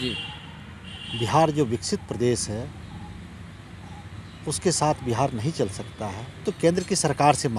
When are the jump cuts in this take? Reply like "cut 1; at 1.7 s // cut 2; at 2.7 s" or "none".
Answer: cut 1; at 6.3 s